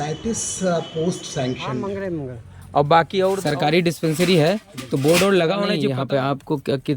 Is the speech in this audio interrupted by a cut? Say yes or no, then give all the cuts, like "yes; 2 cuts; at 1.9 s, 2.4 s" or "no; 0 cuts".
yes; 3 cuts; at 1.8 s, 3.6 s, 5.9 s